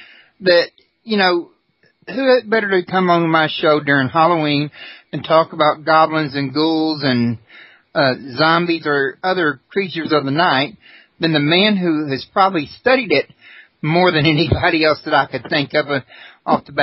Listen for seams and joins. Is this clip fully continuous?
yes; 0 cuts

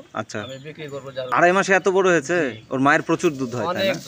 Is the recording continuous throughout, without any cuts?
no; 1 cut; at 1.3 s

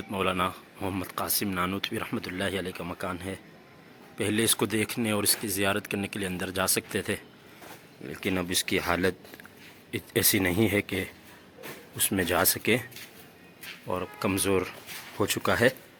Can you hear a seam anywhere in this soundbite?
no; 0 cuts

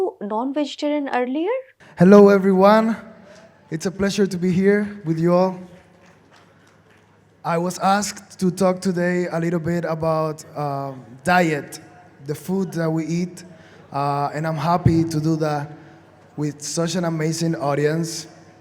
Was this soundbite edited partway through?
no; 0 cuts

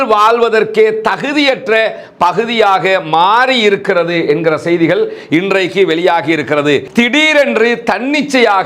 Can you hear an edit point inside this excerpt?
yes; 1 cut; at 6.9 s

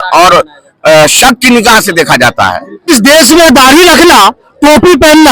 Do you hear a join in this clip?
yes; 1 cut; at 2.9 s

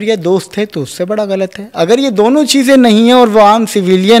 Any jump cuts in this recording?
no; 0 cuts

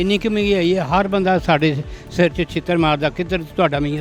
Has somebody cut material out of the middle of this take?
no; 0 cuts

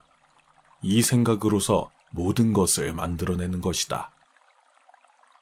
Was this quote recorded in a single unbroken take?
yes; 0 cuts

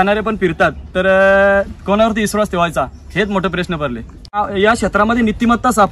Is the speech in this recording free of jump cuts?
no; 1 cut; at 4.3 s

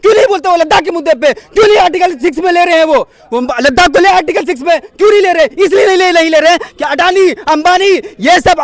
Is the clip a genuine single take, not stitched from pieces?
yes; 0 cuts

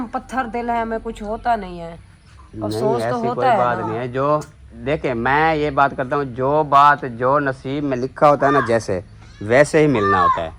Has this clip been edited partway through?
no; 0 cuts

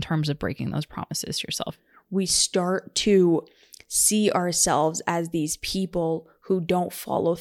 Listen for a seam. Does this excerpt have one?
yes; 1 cut; at 1.7 s

